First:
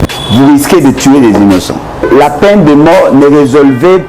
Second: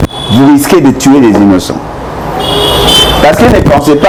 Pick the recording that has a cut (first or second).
first